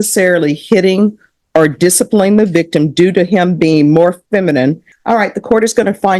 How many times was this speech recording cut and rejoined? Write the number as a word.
one